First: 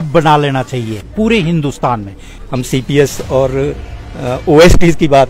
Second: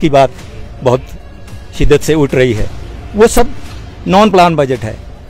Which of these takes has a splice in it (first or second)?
first